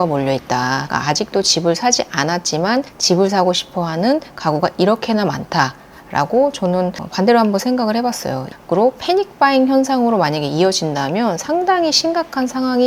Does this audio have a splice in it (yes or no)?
yes